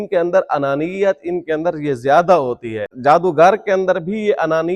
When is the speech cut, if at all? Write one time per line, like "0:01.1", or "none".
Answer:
0:02.8

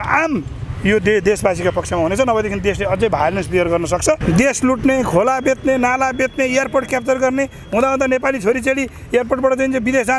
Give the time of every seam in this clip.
0:04.2

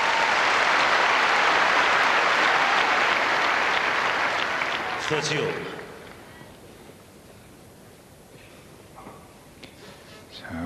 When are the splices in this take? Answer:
0:06.1

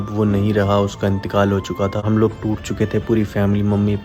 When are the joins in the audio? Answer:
0:02.0

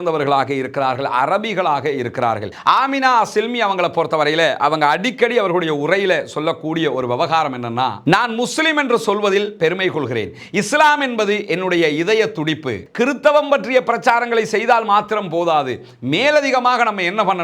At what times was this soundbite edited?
0:02.5
0:12.8

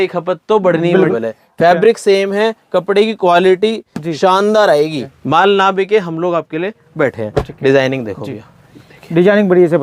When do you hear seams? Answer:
0:01.1
0:05.1

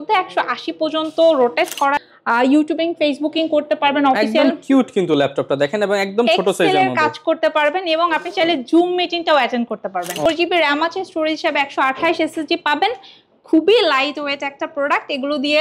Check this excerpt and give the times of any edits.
0:02.0
0:10.3

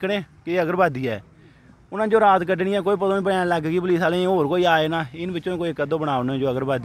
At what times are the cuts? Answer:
none

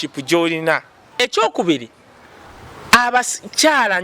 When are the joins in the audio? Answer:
0:01.2

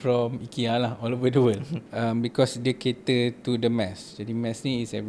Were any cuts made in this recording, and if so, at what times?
0:01.8

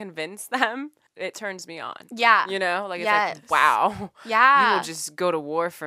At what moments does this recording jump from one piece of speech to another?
0:01.0

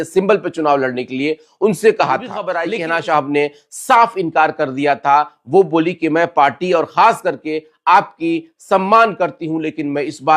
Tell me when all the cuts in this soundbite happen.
0:02.5

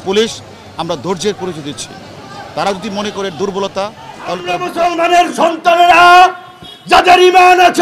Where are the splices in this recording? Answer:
0:04.6

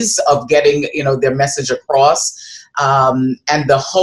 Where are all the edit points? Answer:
none

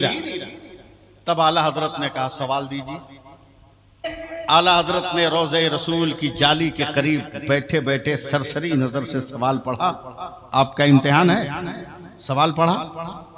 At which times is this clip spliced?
0:04.2

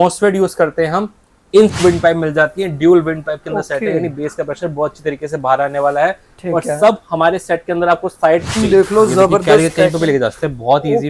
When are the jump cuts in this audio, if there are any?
0:01.8
0:08.5

